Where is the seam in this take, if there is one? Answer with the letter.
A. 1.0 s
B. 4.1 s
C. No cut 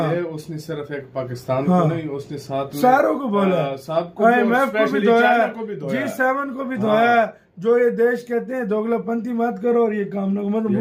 C